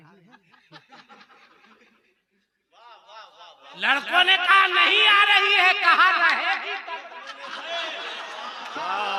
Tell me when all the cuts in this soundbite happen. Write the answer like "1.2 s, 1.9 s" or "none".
none